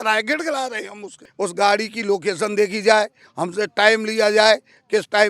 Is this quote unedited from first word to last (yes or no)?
no